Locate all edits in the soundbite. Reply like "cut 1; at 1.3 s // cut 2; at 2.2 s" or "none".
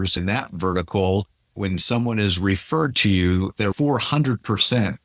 cut 1; at 1.5 s // cut 2; at 3.6 s